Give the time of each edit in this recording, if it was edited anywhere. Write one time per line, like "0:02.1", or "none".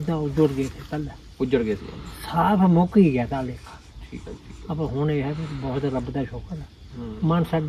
none